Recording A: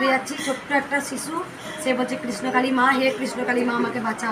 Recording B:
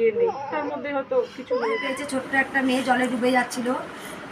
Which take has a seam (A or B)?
B